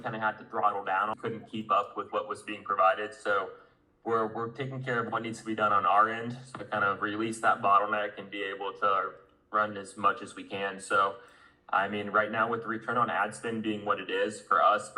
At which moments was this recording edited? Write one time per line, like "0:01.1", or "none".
0:01.1